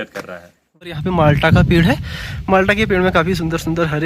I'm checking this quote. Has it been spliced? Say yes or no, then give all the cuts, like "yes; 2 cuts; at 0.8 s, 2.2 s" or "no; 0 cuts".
yes; 1 cut; at 1.0 s